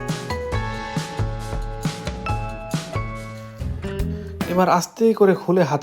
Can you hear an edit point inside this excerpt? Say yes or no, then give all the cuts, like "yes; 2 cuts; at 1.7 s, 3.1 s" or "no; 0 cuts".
yes; 1 cut; at 3.6 s